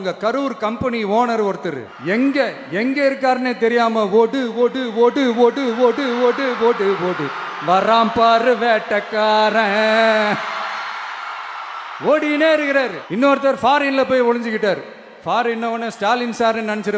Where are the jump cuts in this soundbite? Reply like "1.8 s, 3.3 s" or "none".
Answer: 1.9 s, 13.0 s